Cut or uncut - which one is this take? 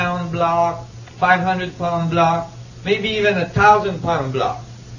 cut